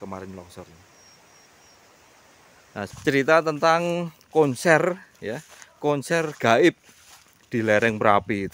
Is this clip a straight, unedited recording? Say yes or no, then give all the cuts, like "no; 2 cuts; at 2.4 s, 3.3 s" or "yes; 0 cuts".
no; 1 cut; at 2.7 s